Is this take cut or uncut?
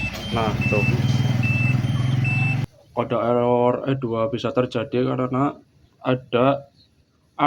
cut